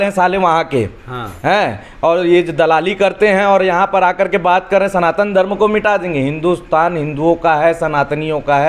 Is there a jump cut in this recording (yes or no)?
no